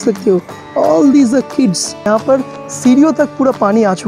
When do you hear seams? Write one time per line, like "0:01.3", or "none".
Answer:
0:02.1